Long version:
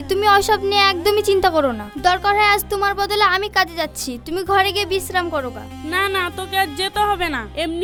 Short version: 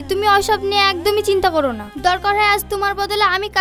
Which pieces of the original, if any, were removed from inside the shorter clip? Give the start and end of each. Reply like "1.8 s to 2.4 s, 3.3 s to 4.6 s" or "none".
none